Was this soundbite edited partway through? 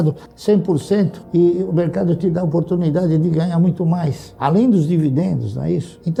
no; 0 cuts

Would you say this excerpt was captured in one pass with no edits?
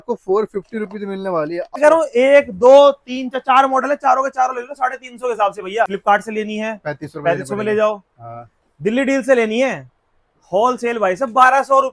no; 2 cuts; at 1.8 s, 5.9 s

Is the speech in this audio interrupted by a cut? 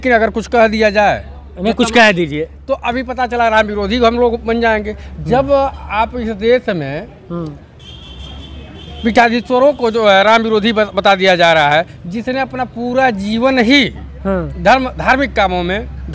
no; 0 cuts

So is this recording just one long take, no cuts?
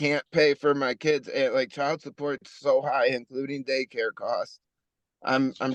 yes; 0 cuts

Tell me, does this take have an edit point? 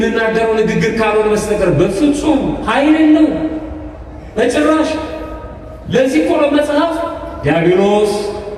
no; 0 cuts

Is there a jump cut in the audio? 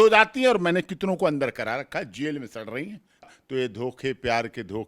yes; 1 cut; at 3.3 s

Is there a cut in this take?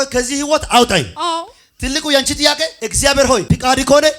yes; 3 cuts; at 1.1 s, 2.8 s, 3.4 s

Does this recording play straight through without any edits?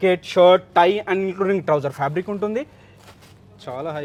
yes; 0 cuts

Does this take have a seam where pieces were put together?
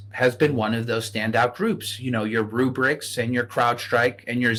no; 0 cuts

